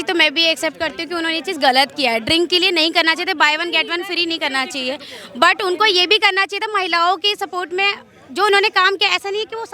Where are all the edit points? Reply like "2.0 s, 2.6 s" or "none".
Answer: none

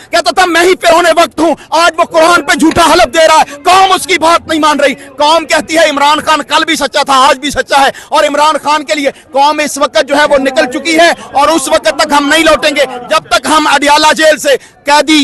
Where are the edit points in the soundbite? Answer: none

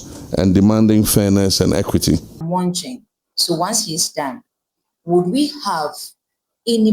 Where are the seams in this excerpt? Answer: 2.4 s

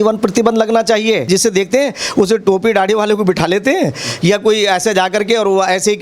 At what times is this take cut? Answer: 1.3 s

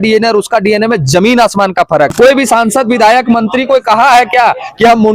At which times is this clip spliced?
2.1 s

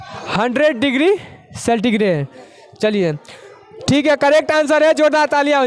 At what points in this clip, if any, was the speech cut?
none

